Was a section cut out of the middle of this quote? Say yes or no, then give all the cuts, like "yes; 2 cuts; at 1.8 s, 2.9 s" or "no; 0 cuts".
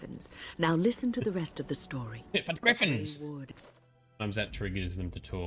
yes; 1 cut; at 3.5 s